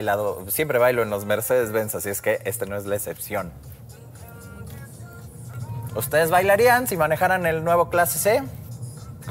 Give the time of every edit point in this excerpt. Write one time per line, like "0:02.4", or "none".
0:05.5